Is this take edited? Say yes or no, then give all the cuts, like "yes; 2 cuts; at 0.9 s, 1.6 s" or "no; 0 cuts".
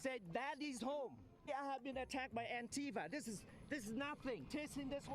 yes; 1 cut; at 1.5 s